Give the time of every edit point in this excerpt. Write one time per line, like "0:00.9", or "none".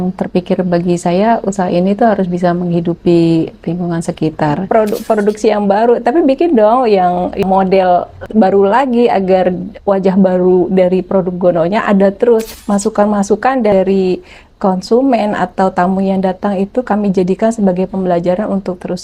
0:04.6
0:07.4
0:08.2
0:12.6
0:13.7